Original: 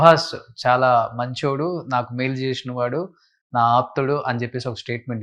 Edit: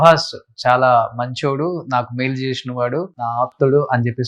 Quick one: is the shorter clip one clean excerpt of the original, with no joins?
no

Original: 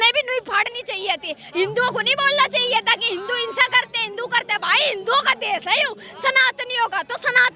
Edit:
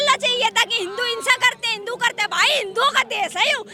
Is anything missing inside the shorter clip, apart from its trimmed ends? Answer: no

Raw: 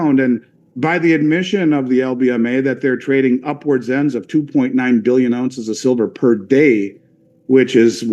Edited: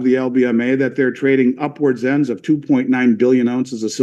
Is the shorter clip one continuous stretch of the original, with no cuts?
yes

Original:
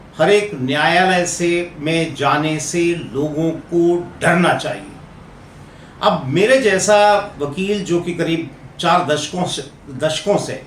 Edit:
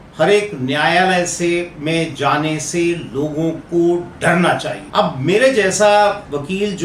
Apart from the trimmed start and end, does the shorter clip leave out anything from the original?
yes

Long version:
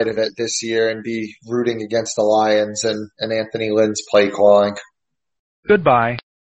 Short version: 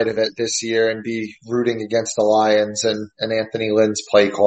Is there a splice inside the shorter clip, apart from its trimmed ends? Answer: no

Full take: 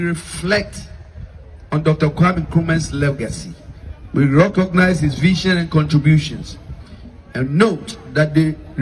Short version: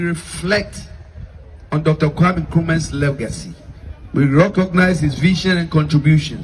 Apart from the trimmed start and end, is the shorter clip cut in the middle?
no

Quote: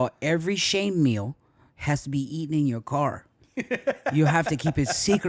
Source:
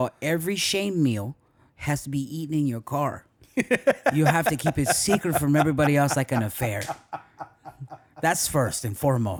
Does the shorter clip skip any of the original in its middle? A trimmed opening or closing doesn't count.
no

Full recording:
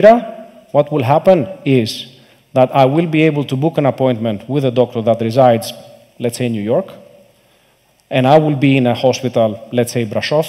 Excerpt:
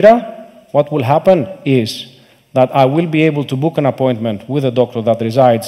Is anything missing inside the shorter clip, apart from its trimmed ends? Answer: no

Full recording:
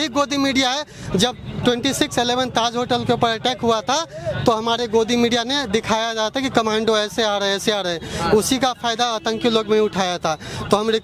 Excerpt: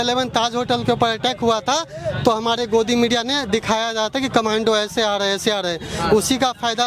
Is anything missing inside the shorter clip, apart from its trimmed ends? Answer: no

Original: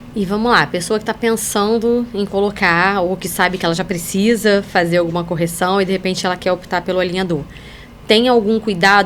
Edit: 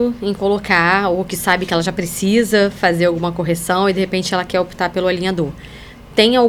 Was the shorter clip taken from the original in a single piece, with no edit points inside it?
yes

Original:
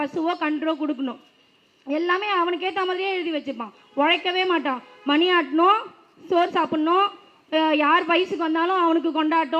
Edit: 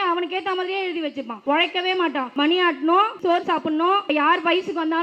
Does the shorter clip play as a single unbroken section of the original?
no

